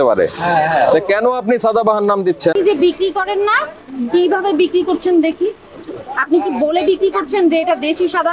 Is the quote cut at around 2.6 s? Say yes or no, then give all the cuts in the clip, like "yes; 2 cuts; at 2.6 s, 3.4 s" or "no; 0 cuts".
no; 0 cuts